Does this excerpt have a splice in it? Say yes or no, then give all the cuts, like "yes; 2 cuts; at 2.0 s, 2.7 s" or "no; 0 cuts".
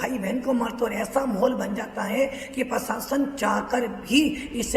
no; 0 cuts